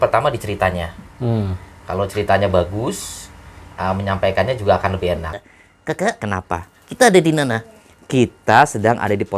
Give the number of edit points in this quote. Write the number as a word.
one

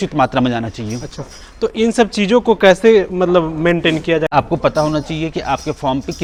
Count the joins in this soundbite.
zero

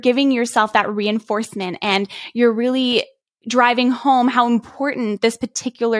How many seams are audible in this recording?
zero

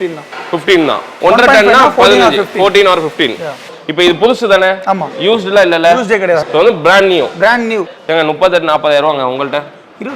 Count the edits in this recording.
three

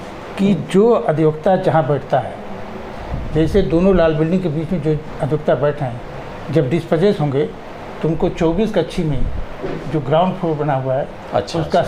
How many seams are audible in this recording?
zero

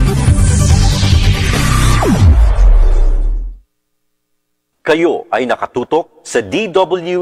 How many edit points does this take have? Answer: one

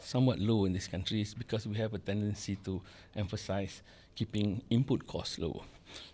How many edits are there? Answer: zero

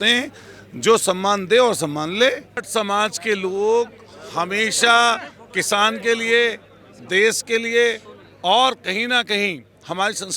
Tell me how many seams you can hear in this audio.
one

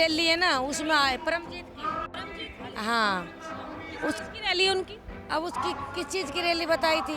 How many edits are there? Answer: zero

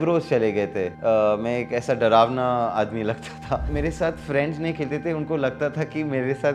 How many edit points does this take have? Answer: two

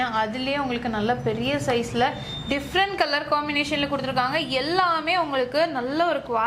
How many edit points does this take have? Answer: zero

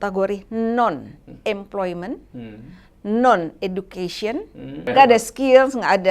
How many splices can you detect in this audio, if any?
one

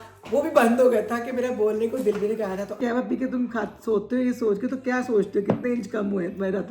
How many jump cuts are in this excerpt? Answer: one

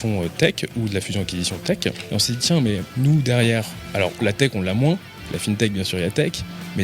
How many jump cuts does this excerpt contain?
four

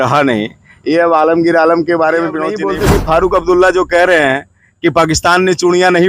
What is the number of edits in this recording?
one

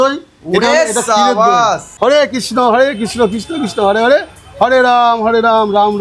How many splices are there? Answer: one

